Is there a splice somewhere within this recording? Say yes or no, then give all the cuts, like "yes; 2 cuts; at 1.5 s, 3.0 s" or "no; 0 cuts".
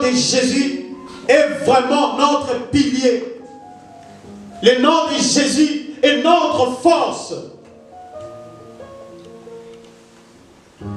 no; 0 cuts